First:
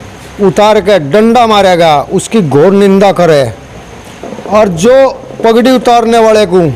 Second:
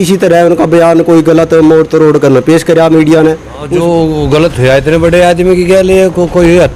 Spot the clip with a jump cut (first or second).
second